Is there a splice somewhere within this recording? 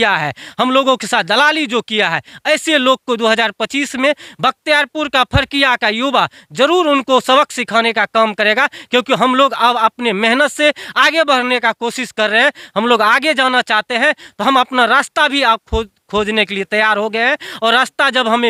no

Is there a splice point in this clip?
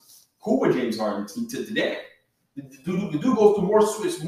no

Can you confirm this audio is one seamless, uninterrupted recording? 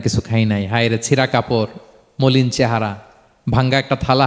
yes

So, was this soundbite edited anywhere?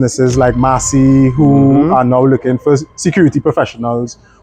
no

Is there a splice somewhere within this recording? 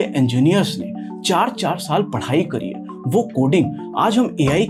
no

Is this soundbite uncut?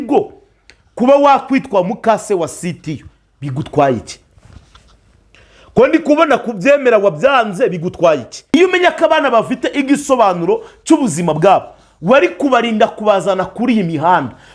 no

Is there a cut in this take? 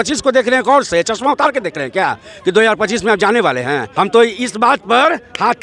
yes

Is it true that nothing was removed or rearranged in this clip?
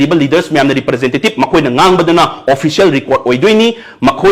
yes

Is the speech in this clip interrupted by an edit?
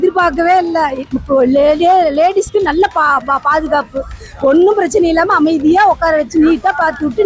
no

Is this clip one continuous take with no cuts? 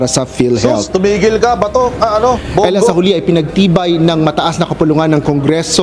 yes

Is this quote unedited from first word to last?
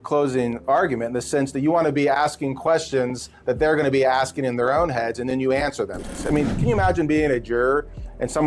no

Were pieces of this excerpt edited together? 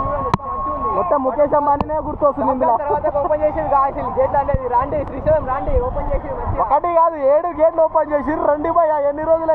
no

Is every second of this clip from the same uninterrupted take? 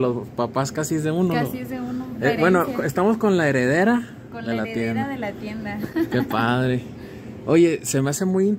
yes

